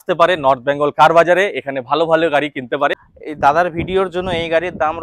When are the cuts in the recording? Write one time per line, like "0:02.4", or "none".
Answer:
0:03.1